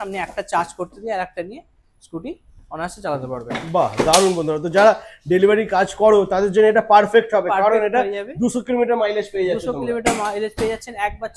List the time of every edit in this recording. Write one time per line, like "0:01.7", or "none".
none